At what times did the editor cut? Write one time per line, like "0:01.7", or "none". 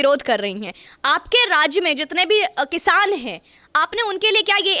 none